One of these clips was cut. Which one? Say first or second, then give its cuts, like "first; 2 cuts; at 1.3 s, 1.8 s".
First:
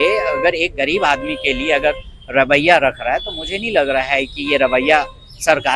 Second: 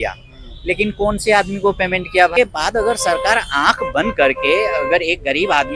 second; 1 cut; at 2.3 s